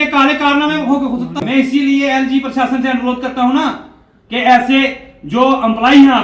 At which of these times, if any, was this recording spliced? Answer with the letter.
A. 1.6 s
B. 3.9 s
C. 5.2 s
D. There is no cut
A